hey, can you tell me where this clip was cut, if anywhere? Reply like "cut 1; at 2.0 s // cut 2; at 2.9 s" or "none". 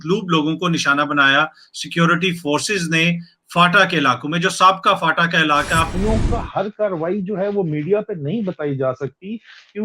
cut 1; at 5.9 s